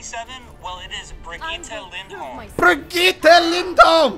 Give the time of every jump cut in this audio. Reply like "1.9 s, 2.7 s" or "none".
none